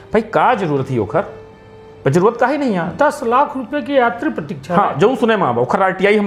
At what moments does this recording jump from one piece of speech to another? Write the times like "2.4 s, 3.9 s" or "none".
none